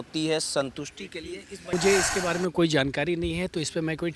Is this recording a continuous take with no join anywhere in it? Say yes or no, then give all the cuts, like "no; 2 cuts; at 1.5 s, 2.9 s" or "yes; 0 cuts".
no; 1 cut; at 1.7 s